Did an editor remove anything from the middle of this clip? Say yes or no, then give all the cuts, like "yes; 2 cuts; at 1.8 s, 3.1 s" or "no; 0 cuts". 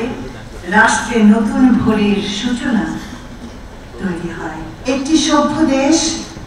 yes; 1 cut; at 4.7 s